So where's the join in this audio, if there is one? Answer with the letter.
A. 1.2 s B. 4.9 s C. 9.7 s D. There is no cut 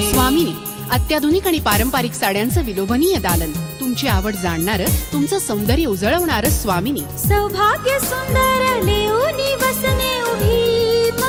D